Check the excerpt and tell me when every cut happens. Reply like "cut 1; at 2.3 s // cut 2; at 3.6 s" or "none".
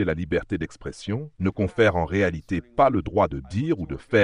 none